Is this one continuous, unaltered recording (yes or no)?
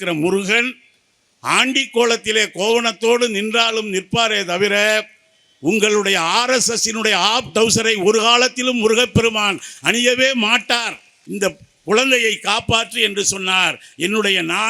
no